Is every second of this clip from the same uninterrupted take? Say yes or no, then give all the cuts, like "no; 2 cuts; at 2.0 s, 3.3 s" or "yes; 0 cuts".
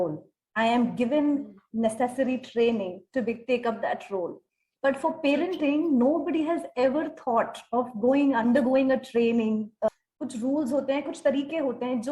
no; 1 cut; at 9.9 s